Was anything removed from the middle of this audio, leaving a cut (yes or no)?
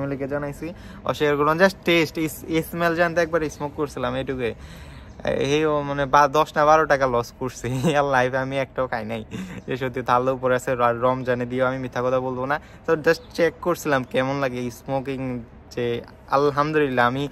no